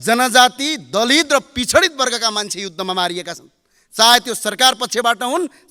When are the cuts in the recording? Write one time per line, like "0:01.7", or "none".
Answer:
none